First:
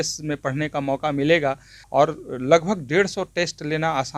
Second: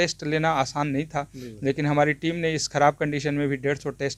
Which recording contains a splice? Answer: first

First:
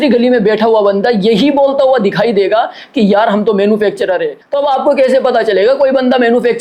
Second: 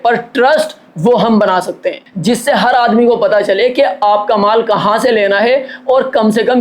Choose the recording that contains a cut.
second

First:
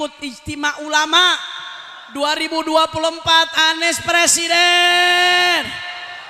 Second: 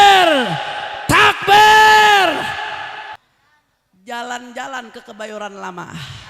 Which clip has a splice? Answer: second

